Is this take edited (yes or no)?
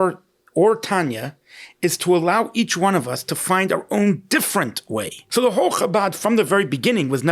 yes